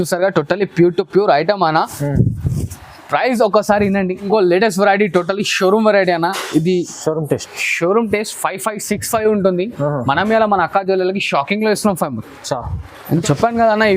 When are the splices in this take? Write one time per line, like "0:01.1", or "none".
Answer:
0:04.2
0:13.2